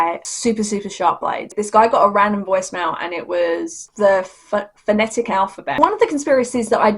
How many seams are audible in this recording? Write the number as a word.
two